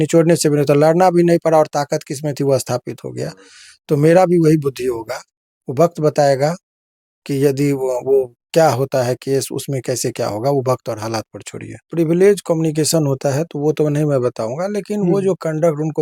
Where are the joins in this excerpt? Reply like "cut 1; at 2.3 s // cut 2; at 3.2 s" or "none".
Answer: cut 1; at 11.8 s